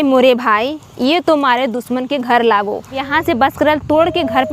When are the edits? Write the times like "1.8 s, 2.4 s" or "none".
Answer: 3.0 s